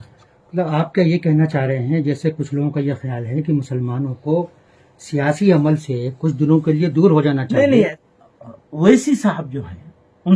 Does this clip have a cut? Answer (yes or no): yes